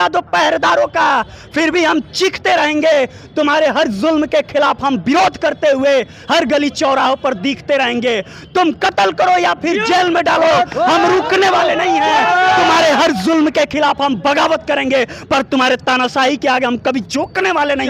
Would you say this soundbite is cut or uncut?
uncut